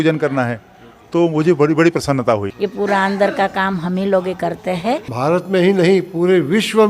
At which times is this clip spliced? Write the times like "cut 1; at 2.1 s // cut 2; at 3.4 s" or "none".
cut 1; at 2.5 s // cut 2; at 5.1 s